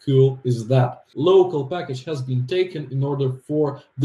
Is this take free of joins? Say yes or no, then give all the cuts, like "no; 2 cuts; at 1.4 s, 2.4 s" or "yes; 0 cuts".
no; 1 cut; at 1.0 s